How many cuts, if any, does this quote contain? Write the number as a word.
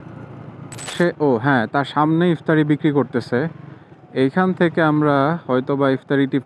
one